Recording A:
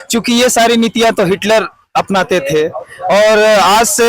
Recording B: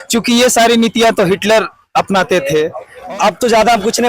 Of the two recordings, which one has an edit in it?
B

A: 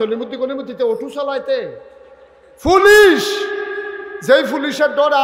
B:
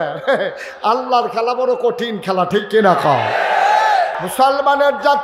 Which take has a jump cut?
B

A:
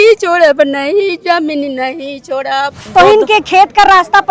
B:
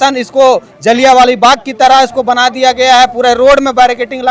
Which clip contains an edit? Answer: A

